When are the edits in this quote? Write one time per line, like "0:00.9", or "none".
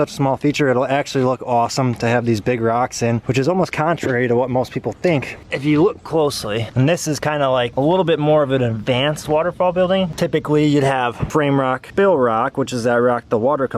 0:05.4
0:10.1